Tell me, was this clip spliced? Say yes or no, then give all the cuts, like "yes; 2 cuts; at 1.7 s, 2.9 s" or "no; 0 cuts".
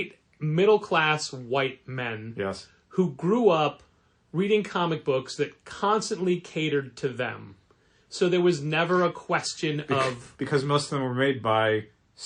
no; 0 cuts